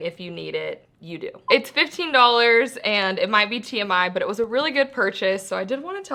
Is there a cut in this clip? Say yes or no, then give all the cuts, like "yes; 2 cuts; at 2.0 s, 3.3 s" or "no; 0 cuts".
yes; 1 cut; at 1.4 s